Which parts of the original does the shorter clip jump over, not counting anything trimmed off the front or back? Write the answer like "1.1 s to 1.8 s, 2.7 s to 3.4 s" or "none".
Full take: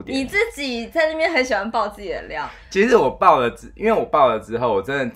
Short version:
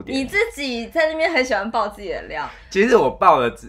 none